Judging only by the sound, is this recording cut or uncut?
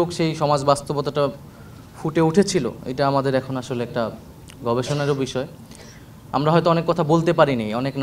uncut